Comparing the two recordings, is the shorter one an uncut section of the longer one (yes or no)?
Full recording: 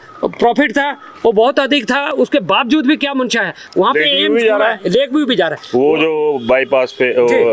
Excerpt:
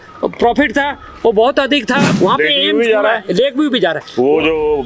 no